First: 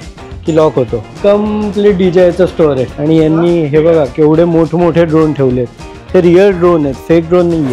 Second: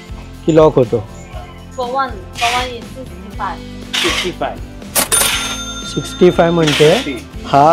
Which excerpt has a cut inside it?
first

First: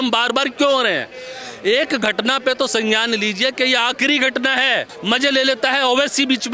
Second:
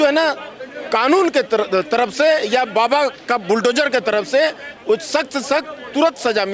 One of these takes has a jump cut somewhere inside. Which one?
first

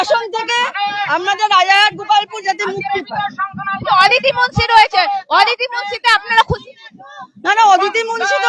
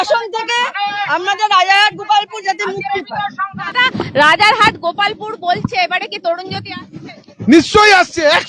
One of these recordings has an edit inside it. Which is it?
second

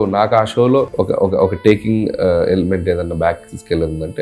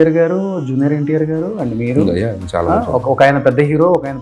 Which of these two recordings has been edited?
first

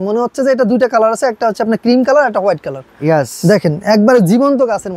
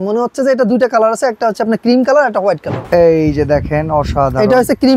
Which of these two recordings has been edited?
second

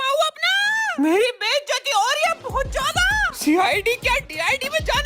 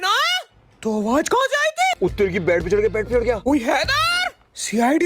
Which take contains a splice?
second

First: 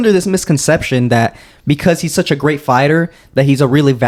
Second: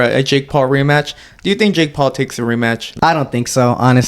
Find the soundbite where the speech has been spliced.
second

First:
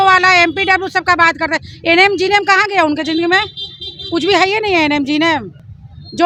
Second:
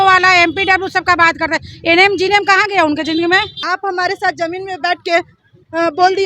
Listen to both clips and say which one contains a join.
second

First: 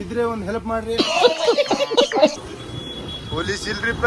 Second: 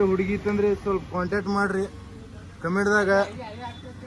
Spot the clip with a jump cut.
first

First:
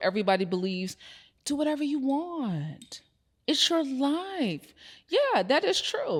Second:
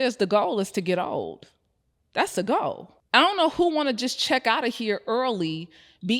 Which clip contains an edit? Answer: second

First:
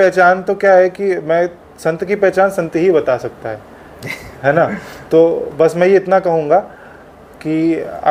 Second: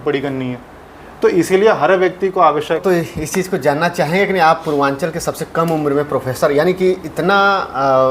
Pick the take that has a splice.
second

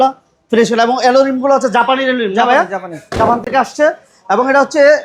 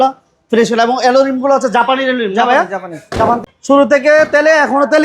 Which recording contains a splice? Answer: second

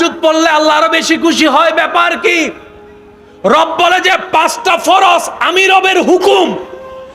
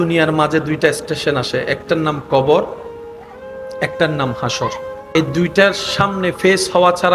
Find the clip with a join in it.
second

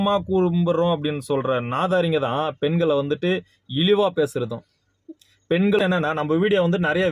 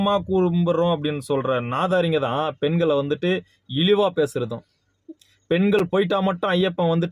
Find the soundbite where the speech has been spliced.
first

